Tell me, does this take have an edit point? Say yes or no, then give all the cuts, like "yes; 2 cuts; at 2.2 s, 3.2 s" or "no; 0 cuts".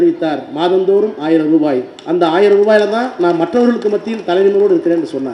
no; 0 cuts